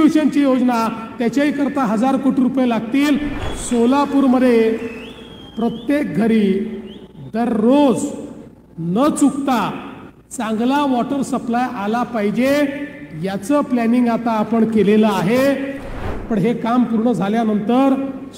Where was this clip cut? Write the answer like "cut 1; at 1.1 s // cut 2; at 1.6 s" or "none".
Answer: cut 1; at 3.3 s // cut 2; at 16.0 s